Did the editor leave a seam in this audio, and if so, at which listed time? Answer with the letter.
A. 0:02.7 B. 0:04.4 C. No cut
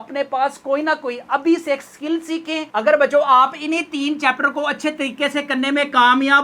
A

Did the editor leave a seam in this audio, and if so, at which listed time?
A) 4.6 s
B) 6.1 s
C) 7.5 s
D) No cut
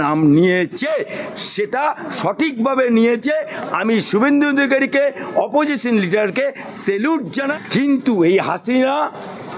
C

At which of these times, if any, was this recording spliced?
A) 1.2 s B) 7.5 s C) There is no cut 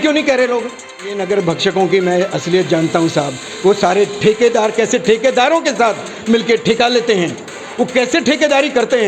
A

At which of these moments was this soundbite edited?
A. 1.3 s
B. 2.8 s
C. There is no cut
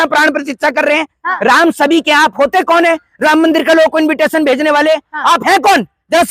A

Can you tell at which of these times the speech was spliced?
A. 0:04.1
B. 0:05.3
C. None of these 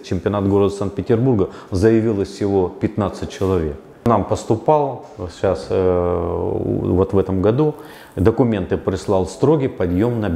A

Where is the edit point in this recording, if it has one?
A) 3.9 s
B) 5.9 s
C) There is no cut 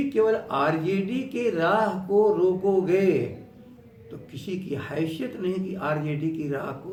C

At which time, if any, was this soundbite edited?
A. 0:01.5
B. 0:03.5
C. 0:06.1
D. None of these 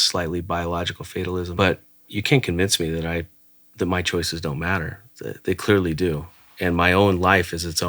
A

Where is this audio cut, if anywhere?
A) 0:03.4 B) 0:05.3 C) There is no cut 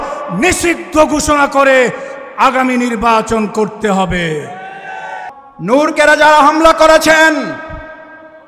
B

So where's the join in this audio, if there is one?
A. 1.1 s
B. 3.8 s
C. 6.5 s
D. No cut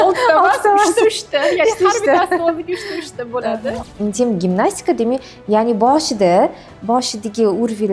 B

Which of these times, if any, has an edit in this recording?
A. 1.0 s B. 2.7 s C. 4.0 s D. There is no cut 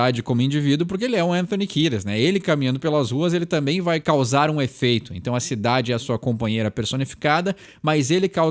C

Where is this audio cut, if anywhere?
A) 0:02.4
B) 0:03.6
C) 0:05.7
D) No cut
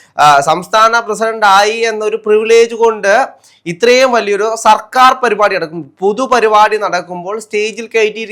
D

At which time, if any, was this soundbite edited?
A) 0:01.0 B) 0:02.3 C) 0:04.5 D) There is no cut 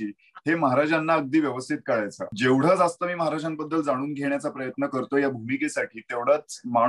B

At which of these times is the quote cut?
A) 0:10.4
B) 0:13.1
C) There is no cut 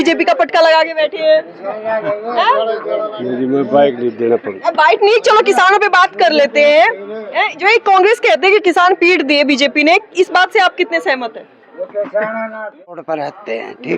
B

